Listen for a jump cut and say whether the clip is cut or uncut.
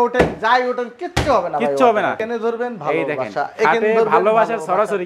cut